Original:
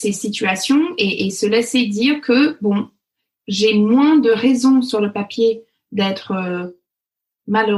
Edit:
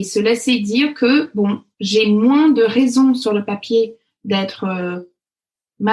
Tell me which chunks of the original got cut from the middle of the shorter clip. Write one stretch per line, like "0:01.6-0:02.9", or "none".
0:03.0-0:03.4